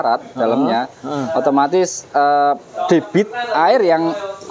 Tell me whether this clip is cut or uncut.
uncut